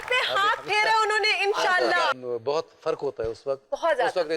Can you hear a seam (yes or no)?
yes